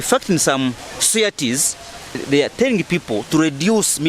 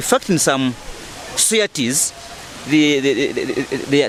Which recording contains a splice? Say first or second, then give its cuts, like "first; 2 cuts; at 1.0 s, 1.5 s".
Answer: first; 2 cuts; at 0.9 s, 2.2 s